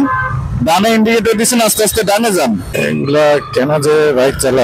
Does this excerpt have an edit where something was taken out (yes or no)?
yes